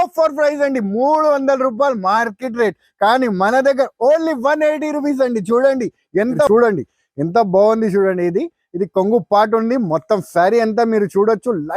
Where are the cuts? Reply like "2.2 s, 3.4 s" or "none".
6.5 s